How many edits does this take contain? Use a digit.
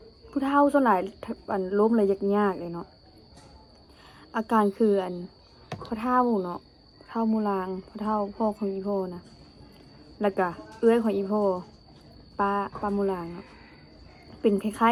0